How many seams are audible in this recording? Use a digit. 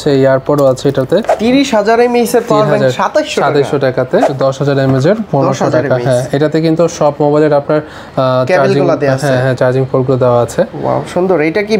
2